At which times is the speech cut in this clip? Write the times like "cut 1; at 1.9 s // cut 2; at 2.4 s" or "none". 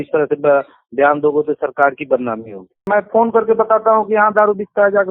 cut 1; at 2.9 s